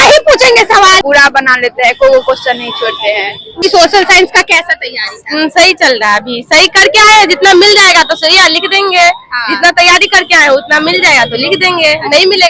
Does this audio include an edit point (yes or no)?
yes